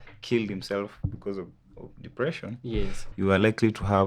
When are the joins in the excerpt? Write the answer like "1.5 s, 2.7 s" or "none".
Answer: 3.0 s